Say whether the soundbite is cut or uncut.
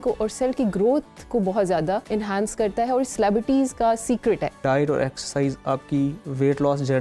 cut